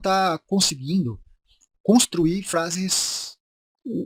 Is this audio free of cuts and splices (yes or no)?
yes